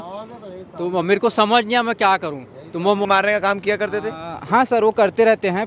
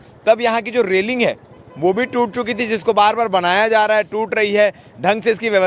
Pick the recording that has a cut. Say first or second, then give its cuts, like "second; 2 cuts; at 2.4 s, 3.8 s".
first; 1 cut; at 3.1 s